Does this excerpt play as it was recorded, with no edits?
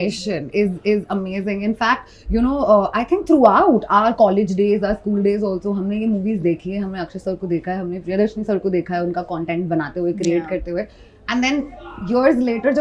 yes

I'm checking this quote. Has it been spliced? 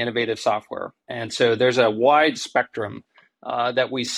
no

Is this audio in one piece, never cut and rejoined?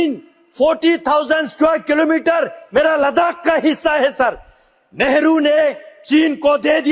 yes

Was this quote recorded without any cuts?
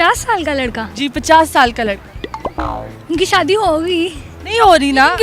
yes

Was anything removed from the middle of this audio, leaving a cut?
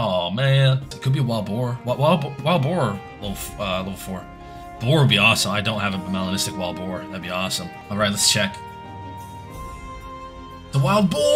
yes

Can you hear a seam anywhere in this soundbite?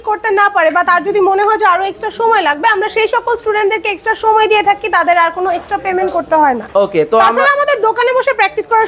no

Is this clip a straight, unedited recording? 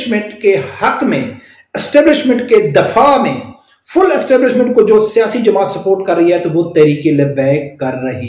yes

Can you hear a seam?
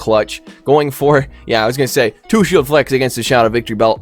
no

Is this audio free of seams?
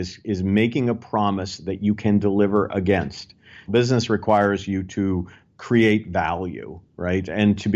no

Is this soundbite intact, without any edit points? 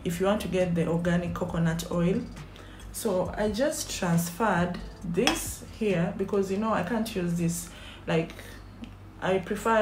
yes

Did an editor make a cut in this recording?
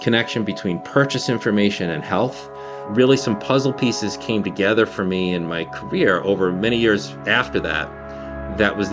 no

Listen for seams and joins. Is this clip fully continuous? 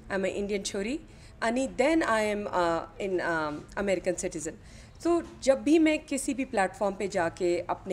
yes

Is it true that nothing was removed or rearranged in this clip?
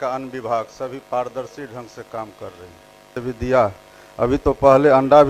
no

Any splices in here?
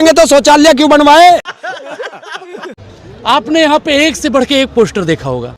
yes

